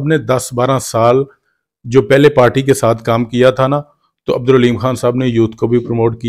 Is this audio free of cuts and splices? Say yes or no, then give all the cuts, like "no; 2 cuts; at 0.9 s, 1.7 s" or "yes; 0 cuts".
yes; 0 cuts